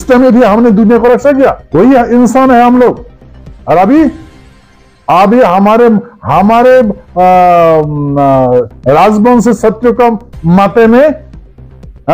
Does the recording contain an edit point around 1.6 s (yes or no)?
yes